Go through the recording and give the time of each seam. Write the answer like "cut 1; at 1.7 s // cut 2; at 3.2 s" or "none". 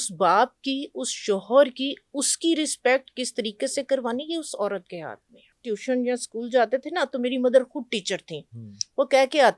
cut 1; at 5.5 s